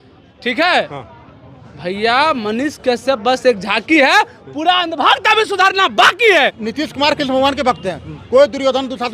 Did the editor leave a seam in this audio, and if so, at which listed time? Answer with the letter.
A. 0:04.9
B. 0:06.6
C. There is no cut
B